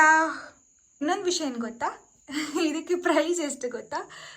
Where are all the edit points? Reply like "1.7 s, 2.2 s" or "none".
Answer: 1.0 s